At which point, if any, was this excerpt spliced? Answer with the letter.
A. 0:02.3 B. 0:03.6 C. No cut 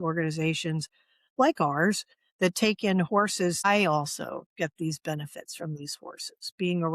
B